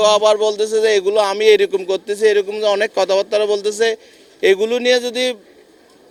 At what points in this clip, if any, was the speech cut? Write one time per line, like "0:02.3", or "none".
none